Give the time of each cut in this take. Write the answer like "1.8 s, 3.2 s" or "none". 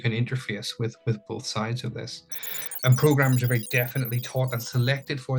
2.8 s